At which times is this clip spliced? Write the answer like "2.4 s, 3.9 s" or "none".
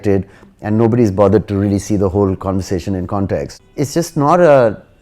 3.6 s

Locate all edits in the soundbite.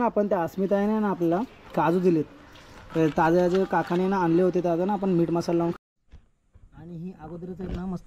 5.8 s

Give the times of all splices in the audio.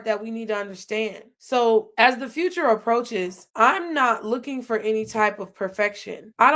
1.3 s

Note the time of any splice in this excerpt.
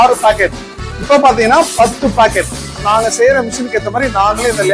2.8 s

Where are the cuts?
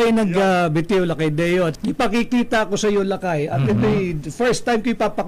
1.7 s

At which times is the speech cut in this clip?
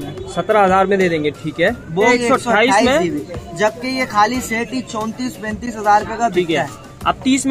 2.1 s

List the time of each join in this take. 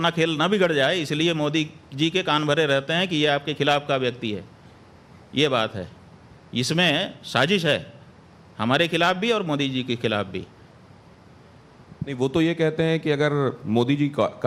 none

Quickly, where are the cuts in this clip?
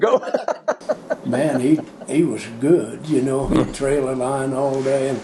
1.2 s

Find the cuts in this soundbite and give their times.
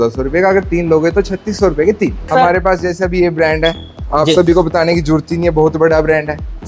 2.3 s

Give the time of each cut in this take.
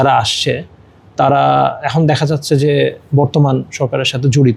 none

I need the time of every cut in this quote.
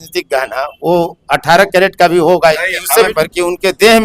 3.1 s

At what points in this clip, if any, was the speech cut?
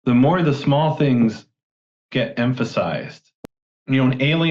3.3 s

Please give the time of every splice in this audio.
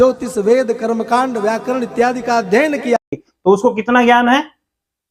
3.1 s

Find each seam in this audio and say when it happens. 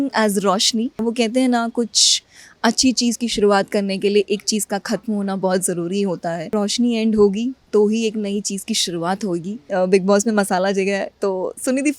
1.0 s, 6.5 s, 9.6 s

